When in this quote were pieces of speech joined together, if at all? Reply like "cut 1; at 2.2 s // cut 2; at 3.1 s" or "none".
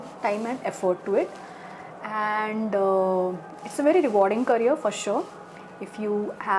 none